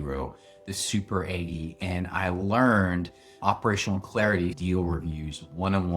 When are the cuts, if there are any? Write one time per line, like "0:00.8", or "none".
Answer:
0:03.4
0:04.6